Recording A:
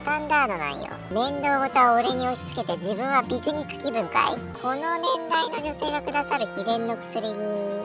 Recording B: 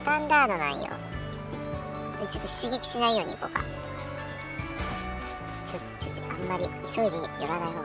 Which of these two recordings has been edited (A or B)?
A